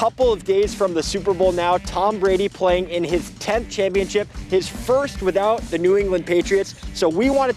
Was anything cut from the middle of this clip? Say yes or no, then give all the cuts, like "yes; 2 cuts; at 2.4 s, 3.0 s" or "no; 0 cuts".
no; 0 cuts